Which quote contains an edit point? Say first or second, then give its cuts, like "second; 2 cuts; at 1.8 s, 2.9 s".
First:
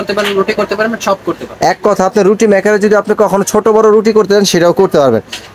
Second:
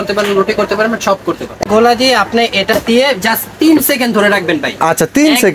second; 1 cut; at 1.6 s